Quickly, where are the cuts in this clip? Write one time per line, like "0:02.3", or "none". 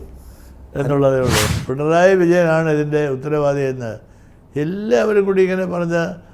0:01.5